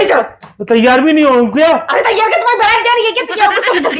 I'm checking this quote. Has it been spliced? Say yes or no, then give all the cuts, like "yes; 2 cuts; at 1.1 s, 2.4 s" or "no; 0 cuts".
no; 0 cuts